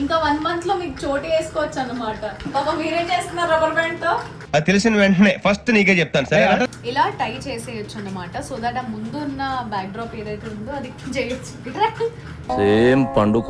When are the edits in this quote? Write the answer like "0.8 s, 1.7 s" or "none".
2.5 s, 6.8 s